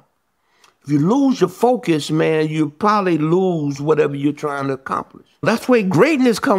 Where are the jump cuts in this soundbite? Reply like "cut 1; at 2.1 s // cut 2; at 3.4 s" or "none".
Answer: cut 1; at 5.4 s